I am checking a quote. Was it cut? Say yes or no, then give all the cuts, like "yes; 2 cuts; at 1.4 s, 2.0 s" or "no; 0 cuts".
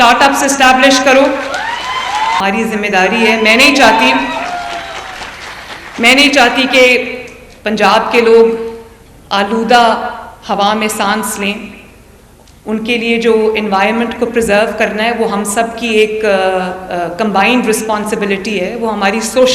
yes; 1 cut; at 2.4 s